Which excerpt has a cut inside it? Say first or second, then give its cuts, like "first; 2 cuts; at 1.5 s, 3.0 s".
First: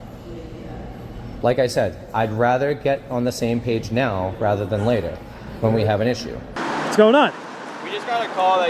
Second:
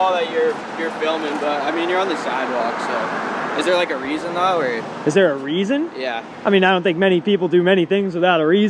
first; 1 cut; at 6.6 s